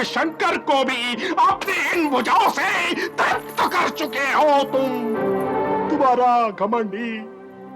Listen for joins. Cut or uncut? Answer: cut